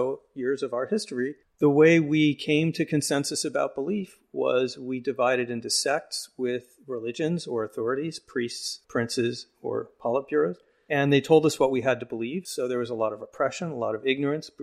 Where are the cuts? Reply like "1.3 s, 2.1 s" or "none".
1.4 s, 8.7 s, 10.2 s, 12.4 s